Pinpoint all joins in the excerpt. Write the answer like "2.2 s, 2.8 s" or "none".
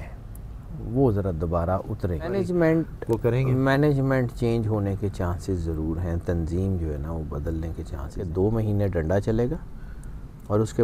2.3 s, 8.2 s